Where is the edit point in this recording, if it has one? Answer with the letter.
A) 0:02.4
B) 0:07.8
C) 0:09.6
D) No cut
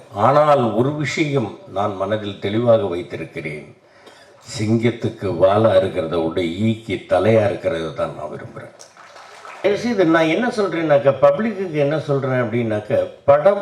C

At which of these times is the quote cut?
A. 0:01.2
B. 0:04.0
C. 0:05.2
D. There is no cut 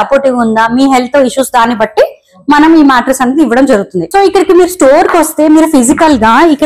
B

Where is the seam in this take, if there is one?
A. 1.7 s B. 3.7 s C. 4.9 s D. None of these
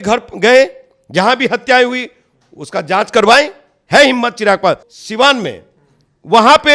C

